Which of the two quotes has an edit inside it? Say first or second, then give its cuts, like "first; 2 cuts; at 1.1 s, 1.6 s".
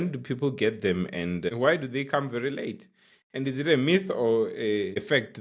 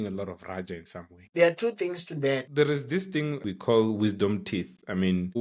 second; 3 cuts; at 1.3 s, 2.5 s, 3.5 s